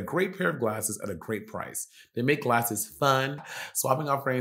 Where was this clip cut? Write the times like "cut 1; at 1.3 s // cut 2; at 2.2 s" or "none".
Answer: cut 1; at 3.5 s